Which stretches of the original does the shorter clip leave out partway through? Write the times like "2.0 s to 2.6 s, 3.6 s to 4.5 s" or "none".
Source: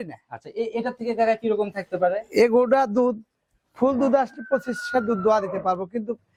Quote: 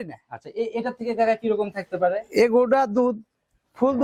none